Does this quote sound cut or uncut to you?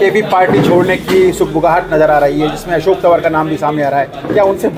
uncut